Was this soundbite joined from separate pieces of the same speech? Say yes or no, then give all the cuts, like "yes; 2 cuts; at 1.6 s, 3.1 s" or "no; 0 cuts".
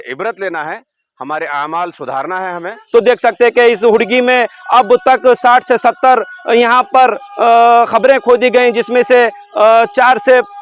yes; 1 cut; at 2.8 s